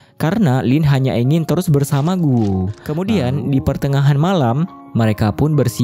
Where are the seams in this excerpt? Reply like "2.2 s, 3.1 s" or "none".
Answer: 2.8 s